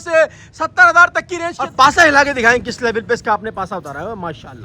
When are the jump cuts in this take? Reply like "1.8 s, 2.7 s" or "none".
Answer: 1.6 s